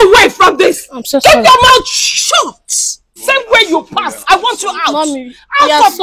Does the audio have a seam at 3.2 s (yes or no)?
yes